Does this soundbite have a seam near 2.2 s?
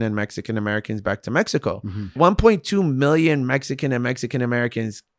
yes; 1 cut; at 2.2 s

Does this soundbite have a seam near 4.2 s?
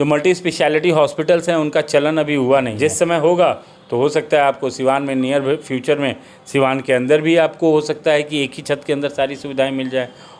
no; 1 cut; at 2.7 s

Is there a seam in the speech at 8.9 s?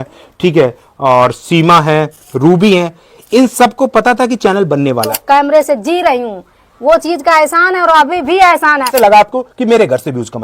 yes; 2 cuts; at 5.2 s, 8.9 s

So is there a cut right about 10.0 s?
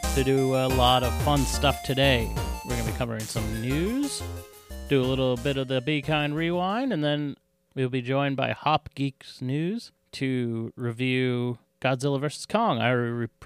yes; 2 cuts; at 10.0 s, 11.7 s

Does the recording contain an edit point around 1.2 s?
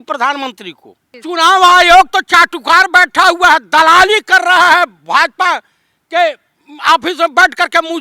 yes; 1 cut; at 1.2 s

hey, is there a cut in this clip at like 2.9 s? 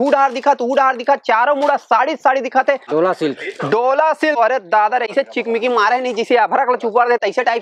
no; 0 cuts

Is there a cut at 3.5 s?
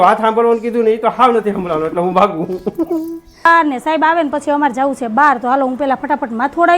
yes; 1 cut; at 3.5 s

